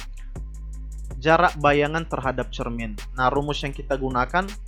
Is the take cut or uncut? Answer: cut